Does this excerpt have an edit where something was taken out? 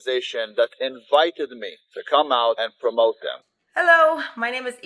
yes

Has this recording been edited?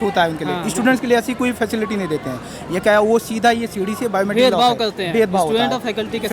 no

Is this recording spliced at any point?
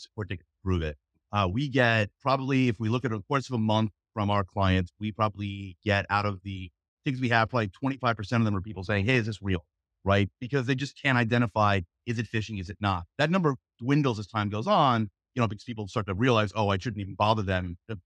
no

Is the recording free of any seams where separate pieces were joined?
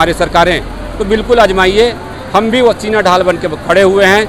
yes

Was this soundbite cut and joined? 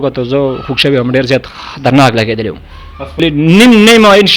yes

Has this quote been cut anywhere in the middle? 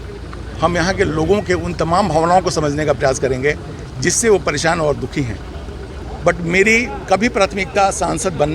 yes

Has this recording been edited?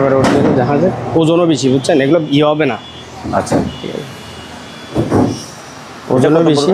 no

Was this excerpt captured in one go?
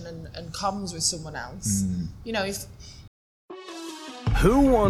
no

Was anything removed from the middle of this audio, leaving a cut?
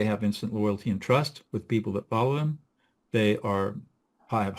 no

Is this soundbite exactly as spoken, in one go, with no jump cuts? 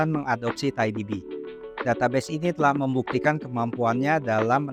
yes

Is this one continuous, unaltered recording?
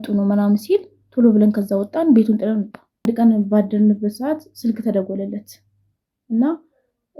no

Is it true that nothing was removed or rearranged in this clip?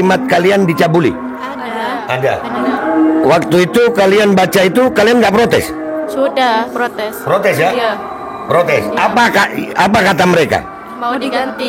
yes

